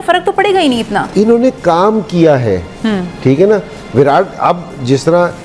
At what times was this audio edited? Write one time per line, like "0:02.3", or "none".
none

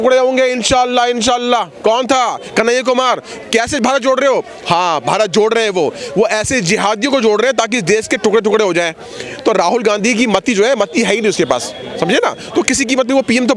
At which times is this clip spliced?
none

